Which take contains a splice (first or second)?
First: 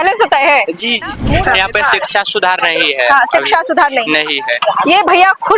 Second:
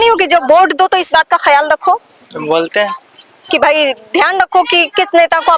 first